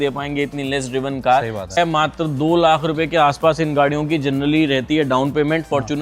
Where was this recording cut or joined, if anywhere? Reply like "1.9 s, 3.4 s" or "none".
1.8 s